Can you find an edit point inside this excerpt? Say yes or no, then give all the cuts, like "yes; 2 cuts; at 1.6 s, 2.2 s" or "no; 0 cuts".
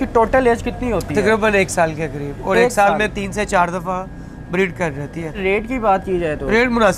no; 0 cuts